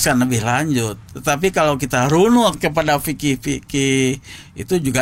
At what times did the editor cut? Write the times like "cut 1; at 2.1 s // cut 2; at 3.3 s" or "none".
none